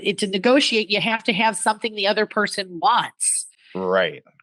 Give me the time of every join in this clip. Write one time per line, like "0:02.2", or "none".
none